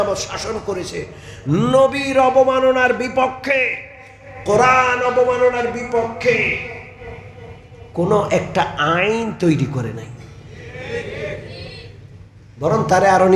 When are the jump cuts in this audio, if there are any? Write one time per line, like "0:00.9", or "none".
none